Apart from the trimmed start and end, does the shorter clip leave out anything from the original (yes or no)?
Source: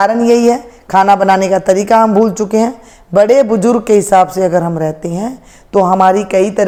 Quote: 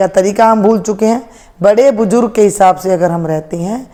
no